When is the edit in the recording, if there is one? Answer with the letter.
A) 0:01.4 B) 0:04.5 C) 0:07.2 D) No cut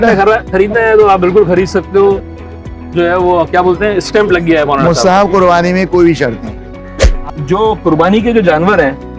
C